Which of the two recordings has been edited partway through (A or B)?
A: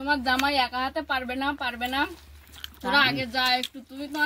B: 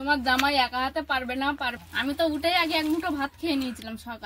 B